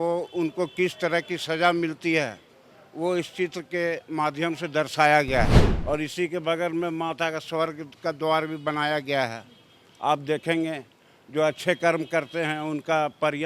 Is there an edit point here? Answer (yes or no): yes